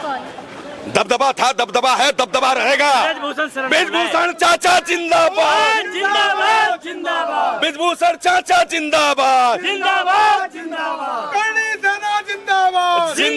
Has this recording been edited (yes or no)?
no